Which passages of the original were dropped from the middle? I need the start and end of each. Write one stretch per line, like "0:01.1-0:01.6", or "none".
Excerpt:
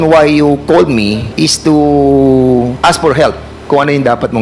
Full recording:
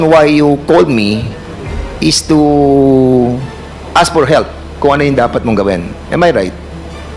0:01.2-0:01.9
0:03.4-0:03.9